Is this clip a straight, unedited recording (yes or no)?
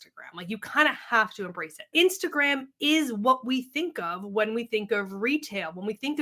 no